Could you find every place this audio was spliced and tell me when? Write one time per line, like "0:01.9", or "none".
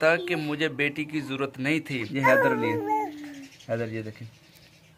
0:02.0